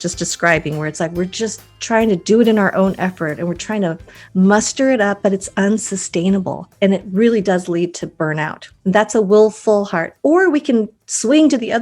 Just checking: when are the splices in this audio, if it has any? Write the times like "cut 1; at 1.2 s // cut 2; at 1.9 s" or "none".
cut 1; at 6.6 s // cut 2; at 8.6 s